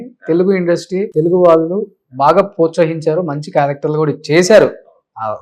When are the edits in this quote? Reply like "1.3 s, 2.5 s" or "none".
1.1 s